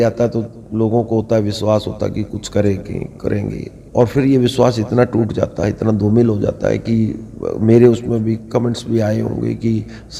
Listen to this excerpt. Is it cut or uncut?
uncut